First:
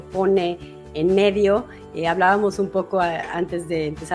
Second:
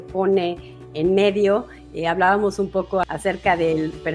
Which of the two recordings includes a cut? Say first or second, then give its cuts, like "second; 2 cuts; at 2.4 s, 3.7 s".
second; 1 cut; at 3.0 s